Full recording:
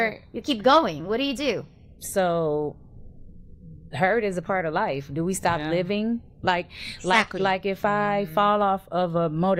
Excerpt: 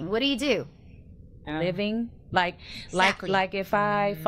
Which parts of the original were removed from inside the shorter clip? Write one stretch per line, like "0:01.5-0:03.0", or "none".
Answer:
0:02.1-0:05.3